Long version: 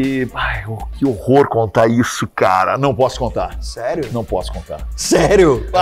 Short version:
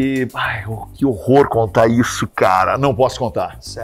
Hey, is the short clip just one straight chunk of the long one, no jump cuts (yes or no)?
yes